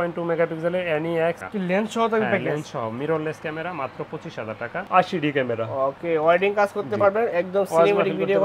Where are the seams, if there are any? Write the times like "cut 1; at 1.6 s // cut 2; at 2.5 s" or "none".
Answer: cut 1; at 1.4 s // cut 2; at 4.8 s

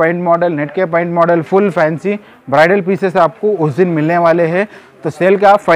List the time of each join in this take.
none

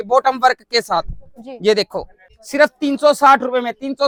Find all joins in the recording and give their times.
none

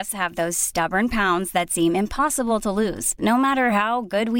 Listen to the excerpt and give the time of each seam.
none

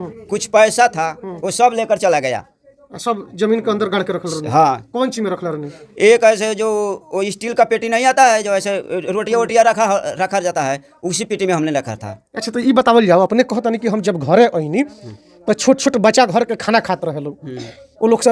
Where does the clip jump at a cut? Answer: none

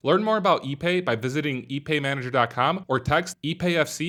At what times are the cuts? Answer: none

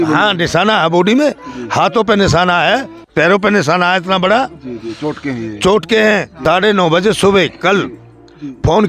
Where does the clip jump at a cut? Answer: cut 1; at 6.3 s

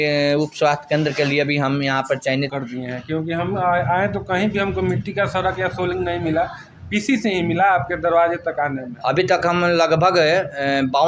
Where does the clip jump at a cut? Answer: cut 1; at 2.5 s

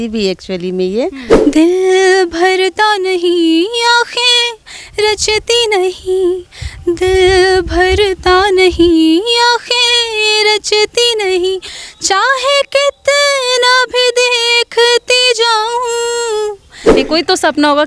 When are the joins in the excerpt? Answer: cut 1; at 1.2 s // cut 2; at 17.0 s

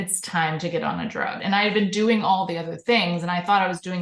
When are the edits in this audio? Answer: cut 1; at 1.4 s

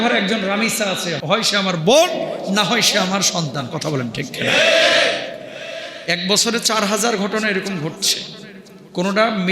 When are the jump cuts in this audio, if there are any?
cut 1; at 1.2 s

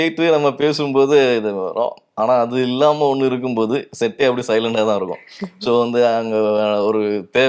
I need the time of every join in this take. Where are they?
none

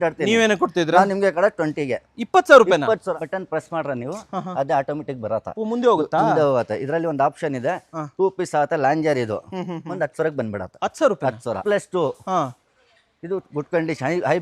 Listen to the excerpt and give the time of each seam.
cut 1; at 3.1 s // cut 2; at 11.6 s

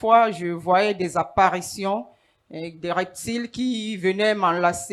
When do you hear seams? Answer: none

